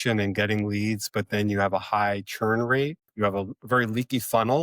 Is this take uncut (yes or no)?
no